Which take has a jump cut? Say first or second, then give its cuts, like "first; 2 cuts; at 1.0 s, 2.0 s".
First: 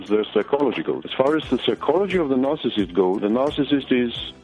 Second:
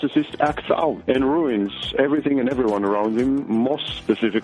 second; 1 cut; at 1.0 s